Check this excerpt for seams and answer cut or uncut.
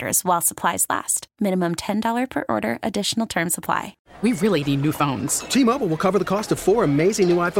cut